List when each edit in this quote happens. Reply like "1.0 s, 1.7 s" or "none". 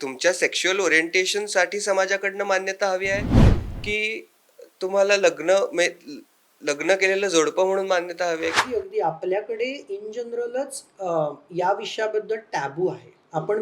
8.6 s